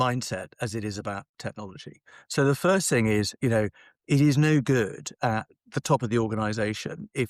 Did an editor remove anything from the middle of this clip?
no; 0 cuts

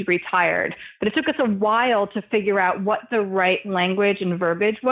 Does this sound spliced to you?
no; 0 cuts

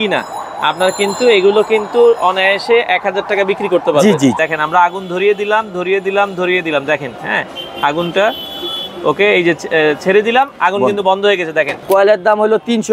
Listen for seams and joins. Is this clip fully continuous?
no; 2 cuts; at 4.4 s, 11.8 s

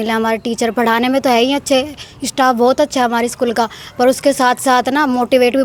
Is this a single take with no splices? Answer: yes; 0 cuts

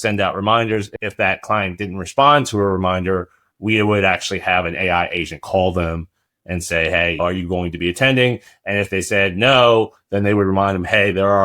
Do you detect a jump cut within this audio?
yes; 2 cuts; at 0.9 s, 7.2 s

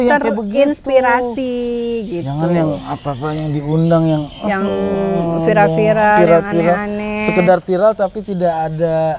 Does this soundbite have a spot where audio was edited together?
no; 0 cuts

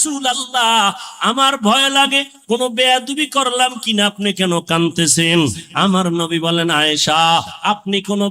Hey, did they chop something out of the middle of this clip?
no; 0 cuts

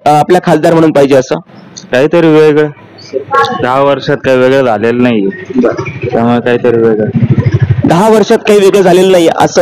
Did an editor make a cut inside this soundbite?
no; 0 cuts

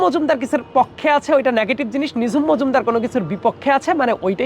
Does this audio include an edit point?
no; 0 cuts

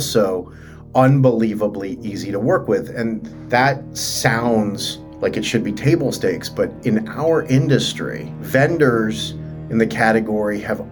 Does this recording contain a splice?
no; 0 cuts

